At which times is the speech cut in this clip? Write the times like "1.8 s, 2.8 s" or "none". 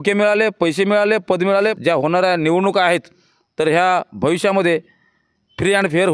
1.8 s